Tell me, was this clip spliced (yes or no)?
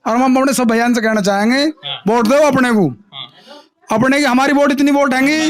no